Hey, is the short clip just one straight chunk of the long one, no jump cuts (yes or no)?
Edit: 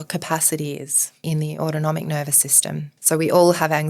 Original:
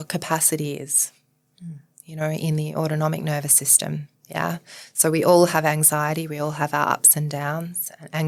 no